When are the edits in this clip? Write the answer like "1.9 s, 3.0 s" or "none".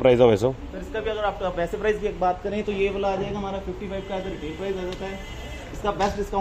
none

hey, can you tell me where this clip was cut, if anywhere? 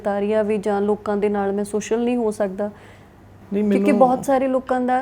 none

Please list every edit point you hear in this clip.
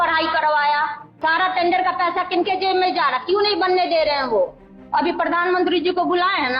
1.0 s, 4.8 s

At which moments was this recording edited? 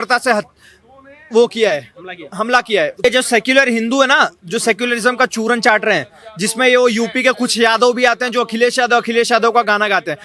3.0 s

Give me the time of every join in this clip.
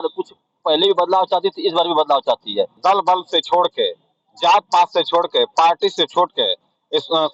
2.8 s

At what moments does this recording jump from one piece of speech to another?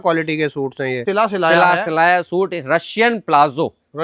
1.0 s

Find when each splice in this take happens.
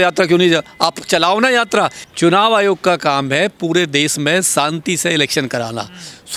2.0 s

